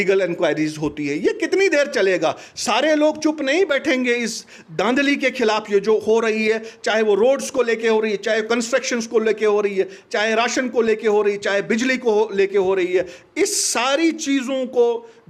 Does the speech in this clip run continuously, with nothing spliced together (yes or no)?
yes